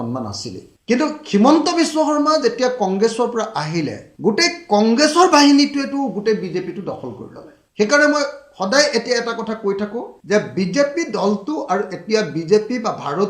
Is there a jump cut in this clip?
no; 0 cuts

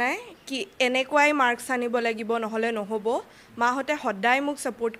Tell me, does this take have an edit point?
no; 0 cuts

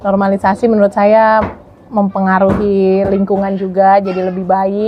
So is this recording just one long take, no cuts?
yes; 0 cuts

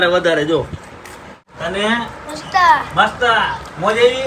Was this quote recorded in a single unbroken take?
no; 1 cut; at 1.5 s

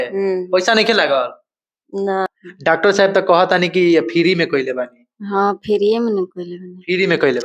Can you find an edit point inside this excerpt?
yes; 1 cut; at 2.3 s

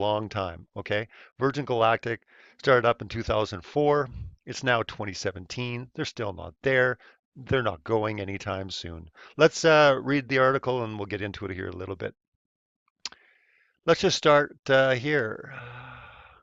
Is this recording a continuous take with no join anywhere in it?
yes; 0 cuts

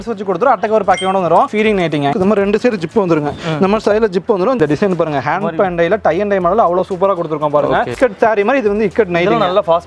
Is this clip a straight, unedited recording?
no; 3 cuts; at 2.1 s, 4.6 s, 7.9 s

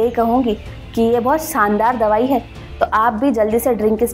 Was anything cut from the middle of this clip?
no; 0 cuts

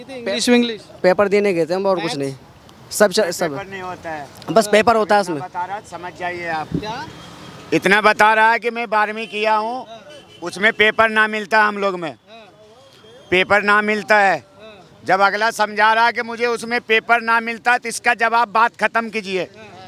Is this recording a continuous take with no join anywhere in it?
yes; 0 cuts

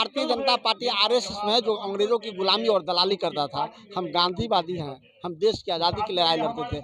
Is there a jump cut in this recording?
no; 0 cuts

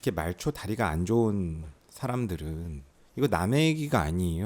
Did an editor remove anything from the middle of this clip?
no; 0 cuts

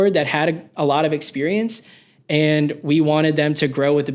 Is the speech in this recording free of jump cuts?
yes; 0 cuts

